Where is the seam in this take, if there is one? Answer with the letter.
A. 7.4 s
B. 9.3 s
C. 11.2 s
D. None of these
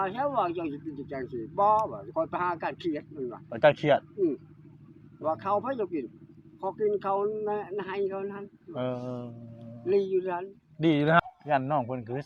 C